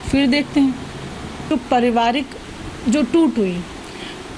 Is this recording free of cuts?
no; 1 cut; at 1.5 s

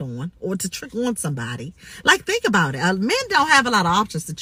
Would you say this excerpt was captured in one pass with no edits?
yes; 0 cuts

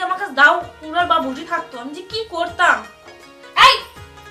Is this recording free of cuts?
yes; 0 cuts

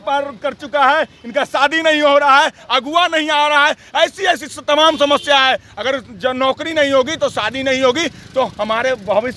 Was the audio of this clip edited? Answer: no; 0 cuts

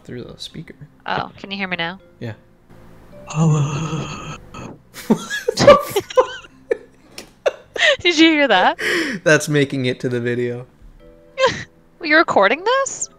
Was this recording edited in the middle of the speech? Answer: no; 0 cuts

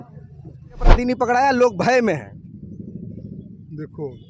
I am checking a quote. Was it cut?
yes; 1 cut; at 1.0 s

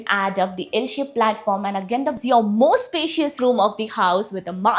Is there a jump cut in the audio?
yes; 1 cut; at 2.2 s

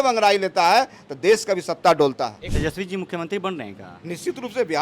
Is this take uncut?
no; 1 cut; at 2.4 s

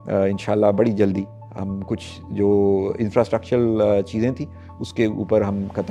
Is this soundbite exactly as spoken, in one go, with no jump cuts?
yes; 0 cuts

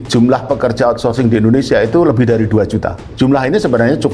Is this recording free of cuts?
no; 1 cut; at 3.0 s

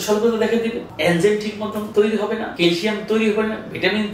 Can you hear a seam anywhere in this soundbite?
yes; 3 cuts; at 0.9 s, 1.8 s, 2.5 s

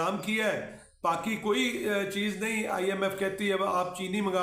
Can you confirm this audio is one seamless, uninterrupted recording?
yes; 0 cuts

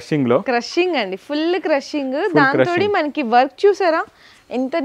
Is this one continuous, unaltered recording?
yes; 0 cuts

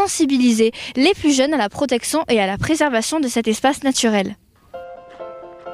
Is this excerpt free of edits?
no; 1 cut; at 4.0 s

